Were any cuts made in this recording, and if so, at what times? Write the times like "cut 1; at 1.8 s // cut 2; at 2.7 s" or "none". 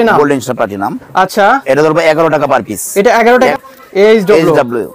cut 1; at 3.5 s